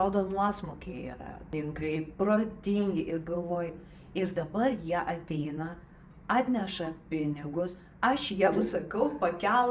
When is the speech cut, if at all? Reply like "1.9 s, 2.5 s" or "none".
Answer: 1.4 s